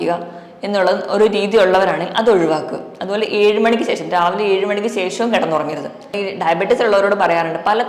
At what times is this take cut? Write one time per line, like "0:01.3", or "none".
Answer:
0:06.1